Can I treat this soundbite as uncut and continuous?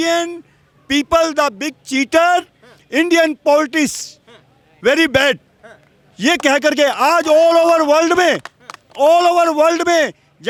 yes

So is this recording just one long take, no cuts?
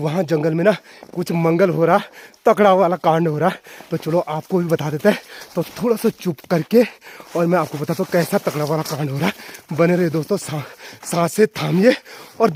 yes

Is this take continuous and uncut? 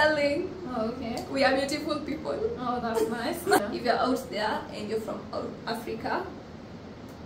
no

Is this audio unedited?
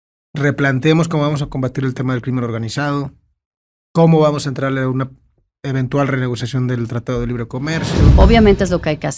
no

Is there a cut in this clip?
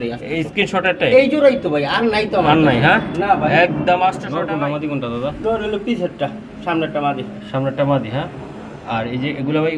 yes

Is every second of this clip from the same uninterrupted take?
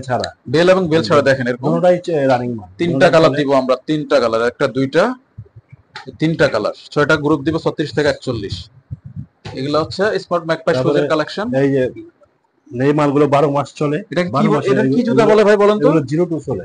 yes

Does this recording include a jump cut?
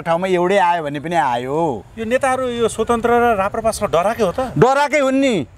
yes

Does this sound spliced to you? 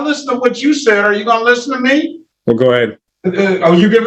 yes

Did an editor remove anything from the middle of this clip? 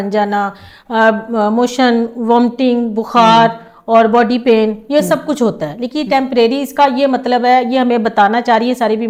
no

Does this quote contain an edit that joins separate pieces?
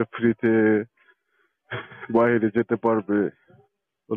no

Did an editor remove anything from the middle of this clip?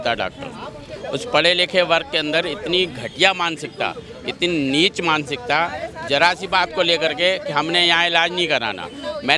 no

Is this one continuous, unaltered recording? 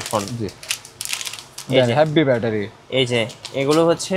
yes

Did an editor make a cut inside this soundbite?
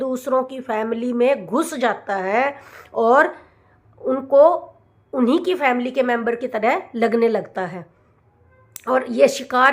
no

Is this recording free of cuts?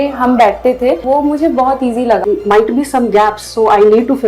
no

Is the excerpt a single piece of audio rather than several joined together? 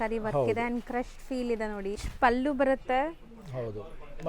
no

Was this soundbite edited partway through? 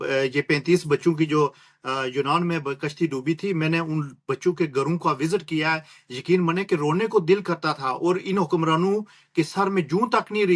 no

